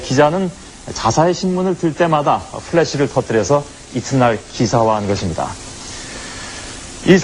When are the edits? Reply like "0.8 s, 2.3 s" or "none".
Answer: none